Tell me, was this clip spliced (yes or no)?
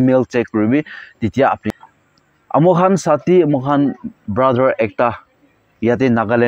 yes